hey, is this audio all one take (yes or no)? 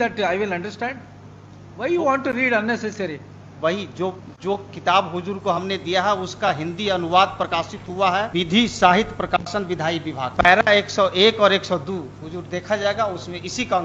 yes